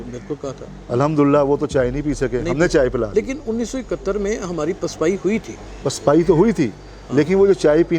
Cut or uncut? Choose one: uncut